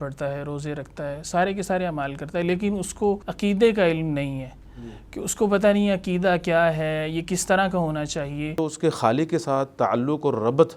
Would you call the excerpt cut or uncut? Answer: cut